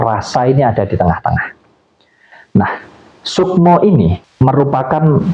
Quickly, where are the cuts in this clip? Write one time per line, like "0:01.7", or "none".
0:04.2